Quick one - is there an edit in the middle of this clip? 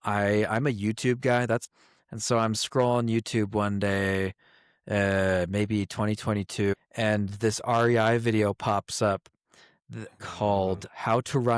yes; 2 cuts; at 1.7 s, 6.7 s

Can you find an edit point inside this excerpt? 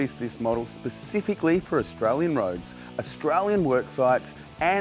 no; 0 cuts

